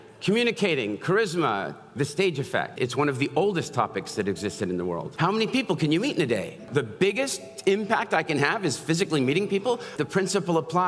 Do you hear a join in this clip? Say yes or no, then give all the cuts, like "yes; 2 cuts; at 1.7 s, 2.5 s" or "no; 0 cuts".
yes; 4 cuts; at 2.7 s, 5.1 s, 6.7 s, 9.9 s